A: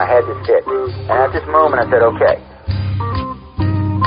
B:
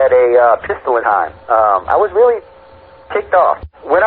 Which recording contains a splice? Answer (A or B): B